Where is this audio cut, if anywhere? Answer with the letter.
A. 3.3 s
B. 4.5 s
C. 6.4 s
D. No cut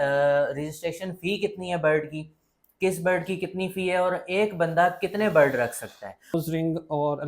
C